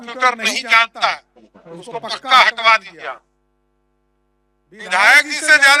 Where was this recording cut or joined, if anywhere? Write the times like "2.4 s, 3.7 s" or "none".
none